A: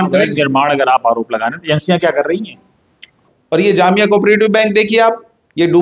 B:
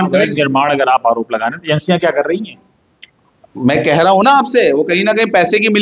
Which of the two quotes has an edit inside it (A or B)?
A